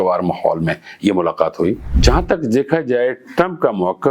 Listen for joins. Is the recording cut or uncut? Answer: cut